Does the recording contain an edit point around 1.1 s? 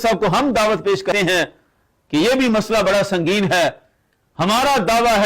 yes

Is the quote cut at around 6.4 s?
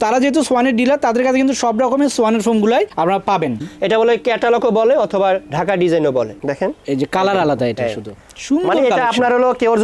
yes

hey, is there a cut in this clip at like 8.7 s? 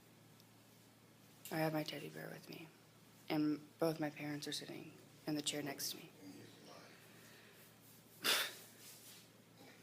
yes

